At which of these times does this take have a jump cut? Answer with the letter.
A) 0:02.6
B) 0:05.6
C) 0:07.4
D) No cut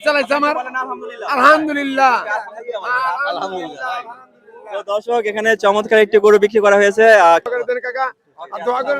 C